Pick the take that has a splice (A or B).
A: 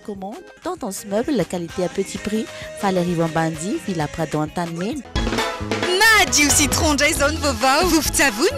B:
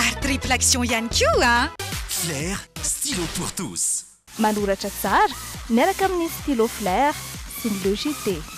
A